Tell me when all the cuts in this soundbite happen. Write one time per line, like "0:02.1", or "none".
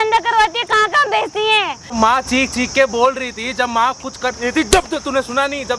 0:01.9